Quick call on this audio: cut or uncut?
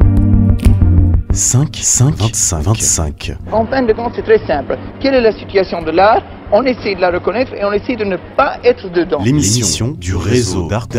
cut